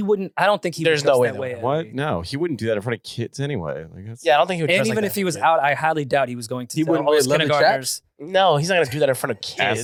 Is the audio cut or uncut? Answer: uncut